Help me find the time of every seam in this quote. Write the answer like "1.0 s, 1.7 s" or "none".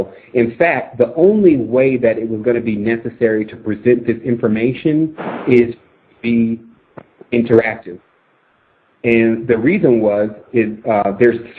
1.8 s